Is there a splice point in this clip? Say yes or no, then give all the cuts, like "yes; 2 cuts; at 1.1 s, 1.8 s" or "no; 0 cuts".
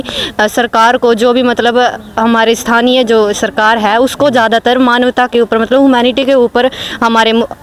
no; 0 cuts